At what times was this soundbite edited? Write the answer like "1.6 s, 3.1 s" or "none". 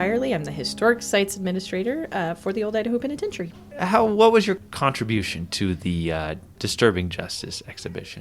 none